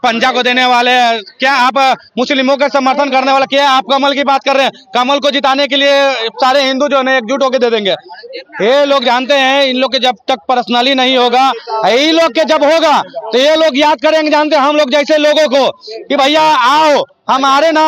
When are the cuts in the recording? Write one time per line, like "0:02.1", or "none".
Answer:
none